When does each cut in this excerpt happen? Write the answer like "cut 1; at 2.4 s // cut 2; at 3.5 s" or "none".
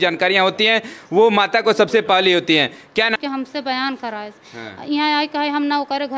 cut 1; at 3.2 s